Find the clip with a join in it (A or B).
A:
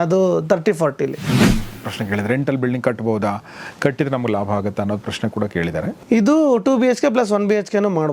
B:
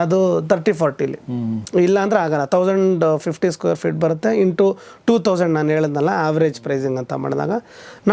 A